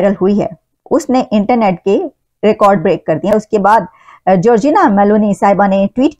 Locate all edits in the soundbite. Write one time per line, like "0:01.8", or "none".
0:03.3